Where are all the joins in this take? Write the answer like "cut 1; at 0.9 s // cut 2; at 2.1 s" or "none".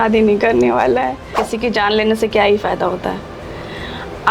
cut 1; at 1.4 s

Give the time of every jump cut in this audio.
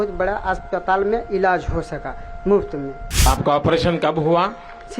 cut 1; at 3.3 s

